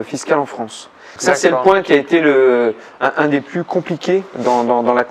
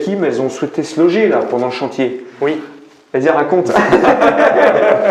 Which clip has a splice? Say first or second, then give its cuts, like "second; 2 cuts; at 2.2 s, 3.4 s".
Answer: first; 1 cut; at 1.1 s